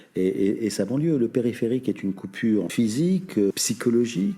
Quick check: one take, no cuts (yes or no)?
no